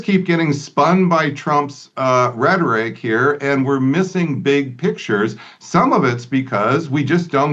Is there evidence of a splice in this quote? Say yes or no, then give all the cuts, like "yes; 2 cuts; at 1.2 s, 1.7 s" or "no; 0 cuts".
no; 0 cuts